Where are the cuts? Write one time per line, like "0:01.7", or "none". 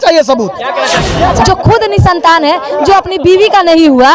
0:01.2